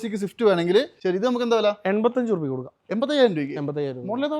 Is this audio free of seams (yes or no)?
no